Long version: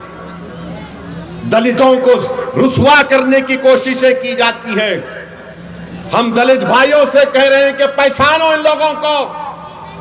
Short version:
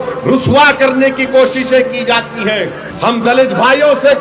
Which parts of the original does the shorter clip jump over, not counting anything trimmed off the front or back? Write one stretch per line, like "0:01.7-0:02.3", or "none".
0:05.1-0:05.9